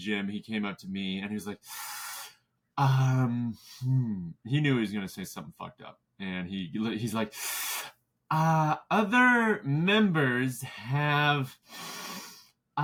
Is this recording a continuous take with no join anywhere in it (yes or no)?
yes